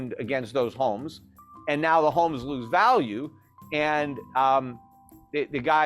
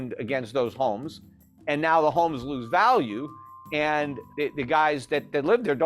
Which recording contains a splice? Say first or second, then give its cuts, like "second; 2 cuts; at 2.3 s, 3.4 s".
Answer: second; 1 cut; at 4.2 s